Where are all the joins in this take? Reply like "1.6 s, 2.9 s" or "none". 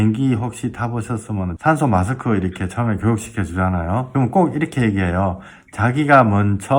1.5 s, 4.1 s